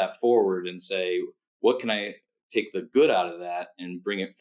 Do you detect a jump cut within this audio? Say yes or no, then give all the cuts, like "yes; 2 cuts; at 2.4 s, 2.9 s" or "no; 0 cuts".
no; 0 cuts